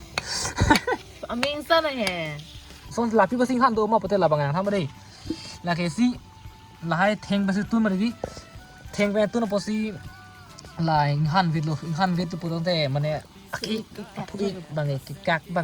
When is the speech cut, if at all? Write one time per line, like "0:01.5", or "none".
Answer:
0:02.8